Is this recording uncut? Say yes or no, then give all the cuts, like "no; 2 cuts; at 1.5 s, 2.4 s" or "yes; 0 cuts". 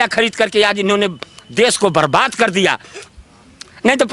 no; 1 cut; at 3.0 s